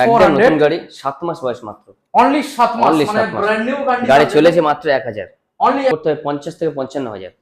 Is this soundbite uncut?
no; 1 cut; at 5.9 s

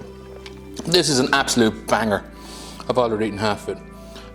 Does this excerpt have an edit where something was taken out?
no; 0 cuts

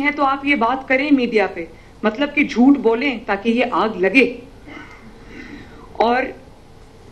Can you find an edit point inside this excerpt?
no; 0 cuts

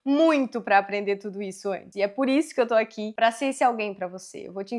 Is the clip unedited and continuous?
no; 2 cuts; at 1.8 s, 3.0 s

